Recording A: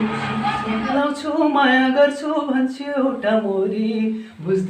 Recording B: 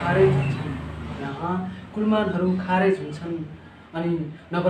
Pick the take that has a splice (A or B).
A